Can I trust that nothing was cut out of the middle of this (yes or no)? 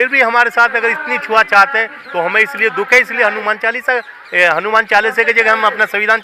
yes